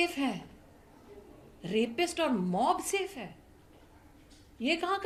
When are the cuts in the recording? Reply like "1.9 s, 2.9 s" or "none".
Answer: none